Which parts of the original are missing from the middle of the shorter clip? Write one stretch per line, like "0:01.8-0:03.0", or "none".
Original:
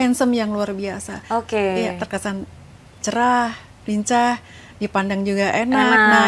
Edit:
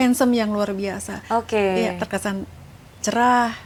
none